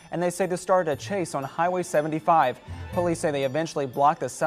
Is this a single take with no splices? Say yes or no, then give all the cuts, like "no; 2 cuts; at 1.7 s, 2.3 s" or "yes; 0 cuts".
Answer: yes; 0 cuts